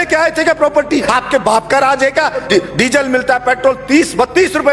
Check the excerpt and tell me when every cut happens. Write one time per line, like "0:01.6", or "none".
0:01.1
0:02.4